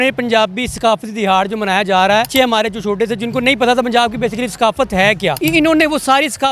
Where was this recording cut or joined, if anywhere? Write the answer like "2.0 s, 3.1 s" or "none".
2.3 s, 5.4 s